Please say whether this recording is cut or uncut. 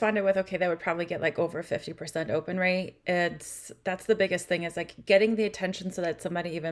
uncut